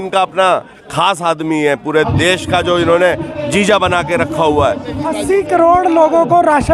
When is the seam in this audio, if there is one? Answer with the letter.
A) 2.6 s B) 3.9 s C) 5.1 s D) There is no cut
C